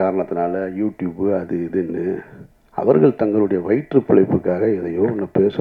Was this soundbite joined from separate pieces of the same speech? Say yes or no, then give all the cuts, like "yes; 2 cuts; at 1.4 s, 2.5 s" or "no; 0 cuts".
no; 0 cuts